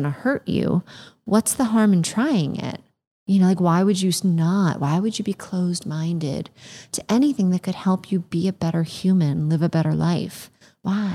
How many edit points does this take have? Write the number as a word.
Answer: zero